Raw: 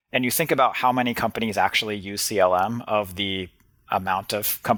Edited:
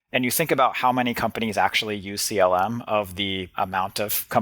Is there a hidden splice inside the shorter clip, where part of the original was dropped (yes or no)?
yes